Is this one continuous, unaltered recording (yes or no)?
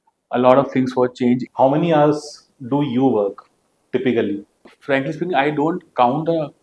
no